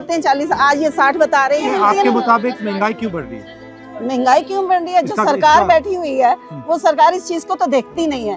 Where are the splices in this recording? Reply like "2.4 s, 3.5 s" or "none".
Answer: none